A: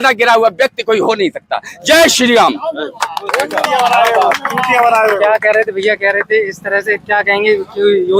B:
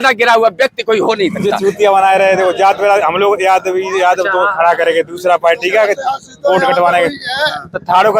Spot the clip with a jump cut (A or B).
B